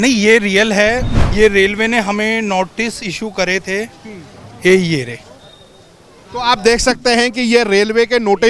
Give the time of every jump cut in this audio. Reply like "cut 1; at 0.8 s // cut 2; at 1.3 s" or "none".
cut 1; at 1.2 s